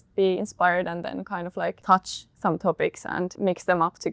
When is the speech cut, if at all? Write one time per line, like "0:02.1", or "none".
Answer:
0:01.8
0:03.3